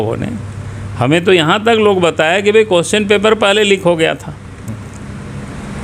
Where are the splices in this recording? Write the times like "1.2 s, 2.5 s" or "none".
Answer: none